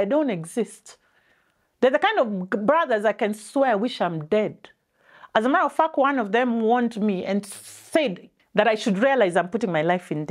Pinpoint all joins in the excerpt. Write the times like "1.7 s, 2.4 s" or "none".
8.2 s